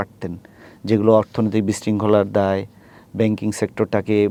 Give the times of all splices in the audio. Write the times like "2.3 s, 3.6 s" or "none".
none